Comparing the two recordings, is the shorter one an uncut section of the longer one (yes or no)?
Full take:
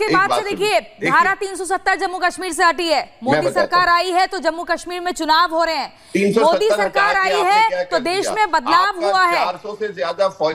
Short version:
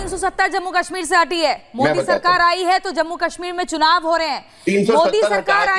yes